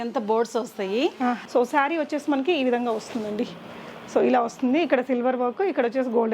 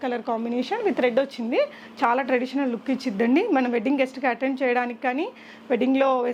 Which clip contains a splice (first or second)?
first